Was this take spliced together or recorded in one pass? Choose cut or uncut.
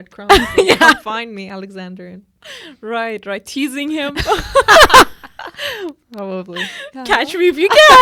uncut